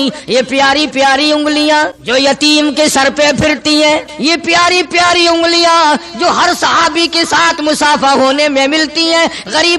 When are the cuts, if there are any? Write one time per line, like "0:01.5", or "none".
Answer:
0:02.0
0:04.1